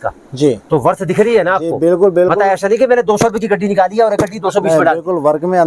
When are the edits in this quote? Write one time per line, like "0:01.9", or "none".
none